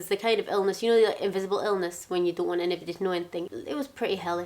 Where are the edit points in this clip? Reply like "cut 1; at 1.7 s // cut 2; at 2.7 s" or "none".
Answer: cut 1; at 3.5 s